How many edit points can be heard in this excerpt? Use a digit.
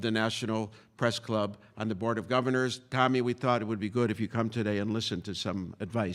1